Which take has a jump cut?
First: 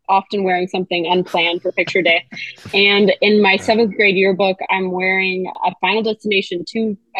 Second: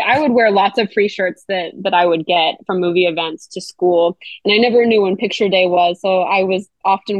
first; 1 cut; at 5.5 s

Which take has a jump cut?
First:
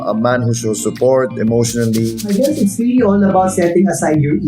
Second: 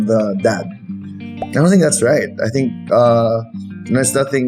first; 1 cut; at 2.3 s

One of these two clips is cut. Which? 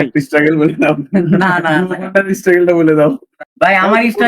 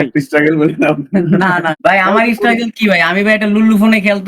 second; 1 cut; at 1.7 s

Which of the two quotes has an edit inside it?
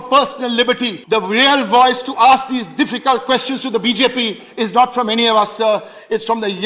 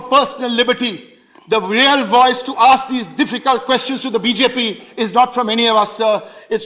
first; 1 cut; at 0.9 s

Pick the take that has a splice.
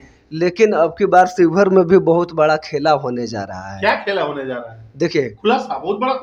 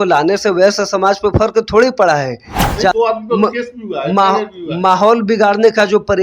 second; 1 cut; at 2.9 s

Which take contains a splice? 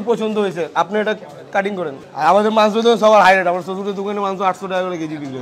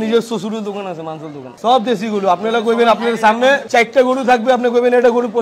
second; 2 cuts; at 1.5 s, 3.6 s

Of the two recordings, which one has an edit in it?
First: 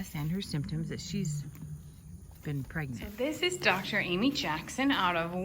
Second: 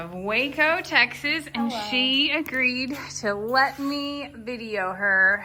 first; 1 cut; at 3.4 s

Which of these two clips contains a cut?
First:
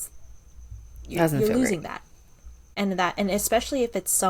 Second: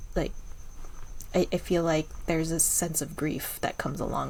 first; 1 cut; at 2.7 s

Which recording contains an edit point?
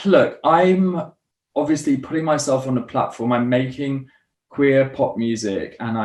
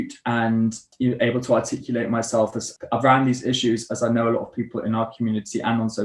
second; 2 cuts; at 0.9 s, 2.7 s

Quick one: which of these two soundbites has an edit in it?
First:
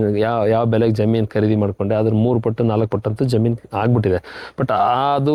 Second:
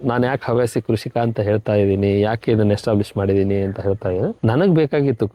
second; 1 cut; at 4.4 s

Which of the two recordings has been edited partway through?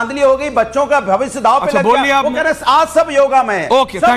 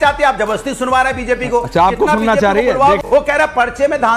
second; 2 cuts; at 1.7 s, 3.0 s

